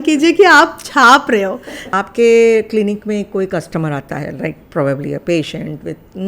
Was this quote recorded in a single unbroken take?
no; 1 cut; at 1.8 s

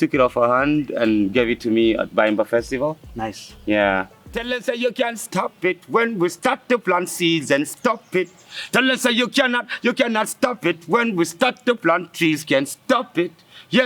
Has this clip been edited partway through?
yes; 1 cut; at 4.4 s

